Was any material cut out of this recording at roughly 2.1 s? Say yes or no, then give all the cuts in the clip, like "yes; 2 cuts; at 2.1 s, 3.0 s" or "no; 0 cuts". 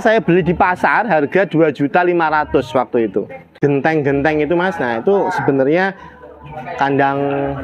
no; 1 cut; at 3.5 s